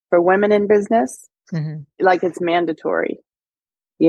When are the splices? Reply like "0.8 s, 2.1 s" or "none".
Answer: 1.9 s

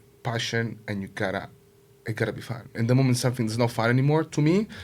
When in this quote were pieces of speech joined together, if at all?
none

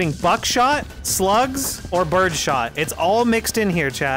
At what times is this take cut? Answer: 1.8 s

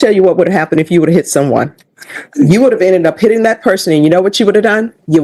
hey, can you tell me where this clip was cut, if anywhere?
none

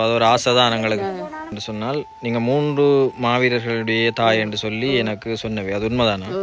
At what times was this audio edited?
1.6 s

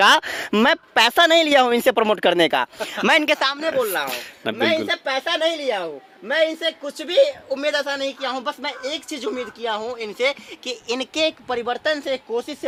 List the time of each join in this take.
none

